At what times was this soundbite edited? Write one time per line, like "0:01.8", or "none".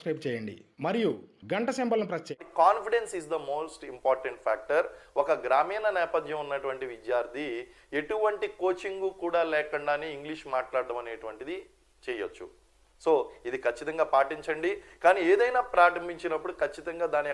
0:02.5